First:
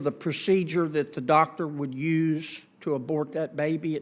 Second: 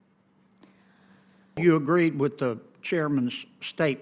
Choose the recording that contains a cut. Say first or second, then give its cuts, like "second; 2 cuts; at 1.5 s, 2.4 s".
second; 1 cut; at 1.6 s